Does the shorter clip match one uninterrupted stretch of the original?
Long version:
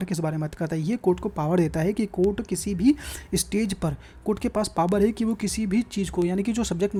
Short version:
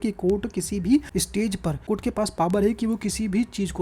no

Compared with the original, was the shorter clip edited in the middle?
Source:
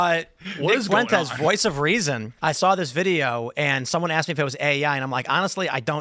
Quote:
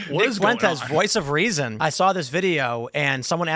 yes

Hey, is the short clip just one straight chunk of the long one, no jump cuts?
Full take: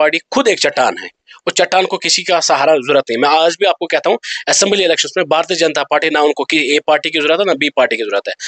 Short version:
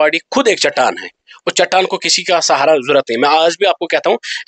yes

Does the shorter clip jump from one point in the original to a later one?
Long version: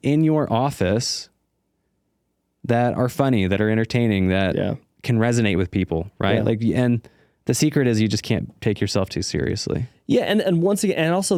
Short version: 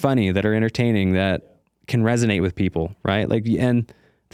no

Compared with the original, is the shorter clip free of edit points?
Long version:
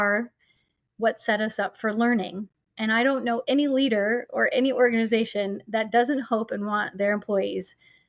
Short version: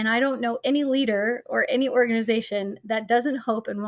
yes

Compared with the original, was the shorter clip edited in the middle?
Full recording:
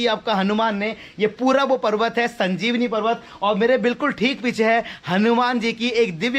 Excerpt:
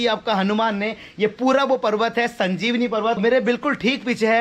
yes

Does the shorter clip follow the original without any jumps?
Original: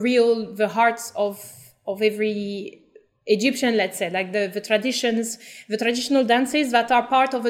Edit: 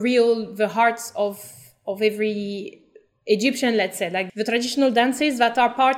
no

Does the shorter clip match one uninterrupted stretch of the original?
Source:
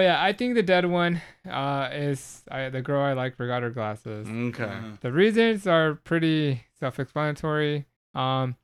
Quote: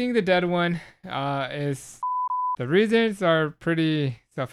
no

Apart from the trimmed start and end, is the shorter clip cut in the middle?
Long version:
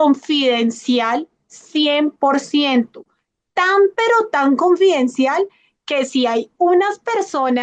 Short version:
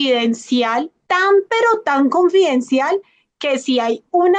yes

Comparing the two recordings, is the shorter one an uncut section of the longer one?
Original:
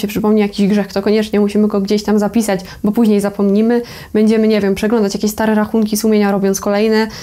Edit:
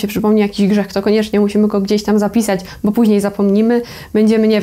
yes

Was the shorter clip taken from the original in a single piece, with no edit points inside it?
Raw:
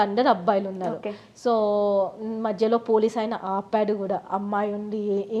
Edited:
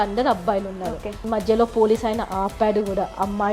no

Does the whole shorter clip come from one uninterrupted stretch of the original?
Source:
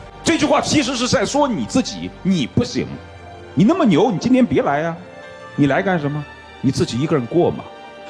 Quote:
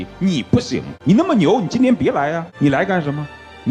no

